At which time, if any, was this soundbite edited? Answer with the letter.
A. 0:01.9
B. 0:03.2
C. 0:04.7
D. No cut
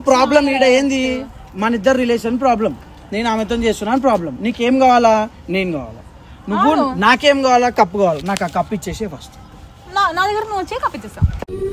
D